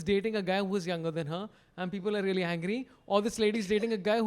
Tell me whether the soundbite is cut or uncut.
uncut